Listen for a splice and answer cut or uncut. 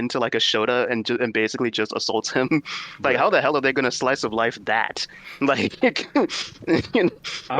uncut